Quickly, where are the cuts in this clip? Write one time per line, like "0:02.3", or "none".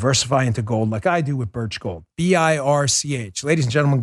0:02.1